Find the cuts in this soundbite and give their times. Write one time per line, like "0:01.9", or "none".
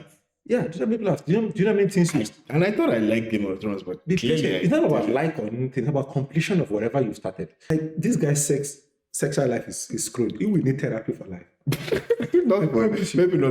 0:07.7